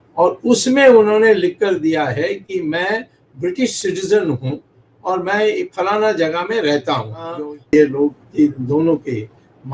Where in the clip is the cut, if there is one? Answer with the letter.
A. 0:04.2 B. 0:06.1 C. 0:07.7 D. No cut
C